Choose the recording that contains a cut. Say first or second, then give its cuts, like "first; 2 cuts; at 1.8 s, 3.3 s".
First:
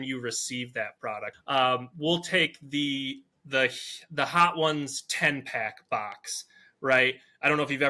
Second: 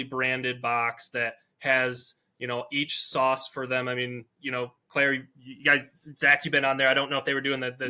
first; 1 cut; at 1.3 s